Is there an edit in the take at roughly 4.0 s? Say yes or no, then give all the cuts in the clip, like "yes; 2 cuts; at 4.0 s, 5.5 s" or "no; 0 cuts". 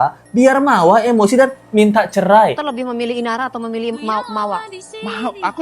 no; 1 cut; at 2.7 s